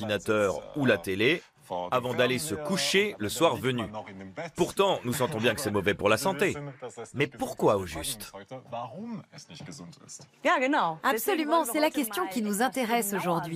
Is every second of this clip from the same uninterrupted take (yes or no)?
yes